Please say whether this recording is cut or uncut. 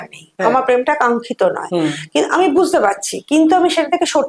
uncut